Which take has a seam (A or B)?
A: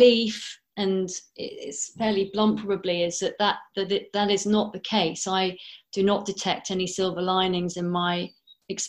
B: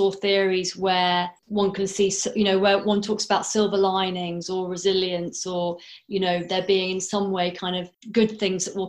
B